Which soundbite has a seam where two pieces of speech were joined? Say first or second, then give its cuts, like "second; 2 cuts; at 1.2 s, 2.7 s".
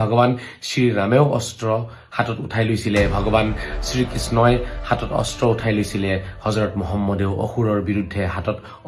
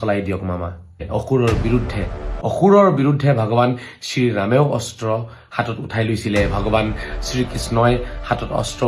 second; 2 cuts; at 1.0 s, 2.3 s